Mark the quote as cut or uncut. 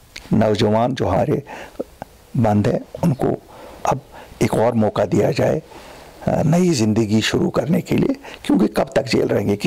cut